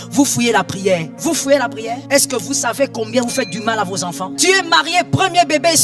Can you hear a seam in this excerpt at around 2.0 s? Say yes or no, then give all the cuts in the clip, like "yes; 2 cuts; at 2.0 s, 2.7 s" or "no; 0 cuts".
yes; 3 cuts; at 1.1 s, 2.0 s, 4.3 s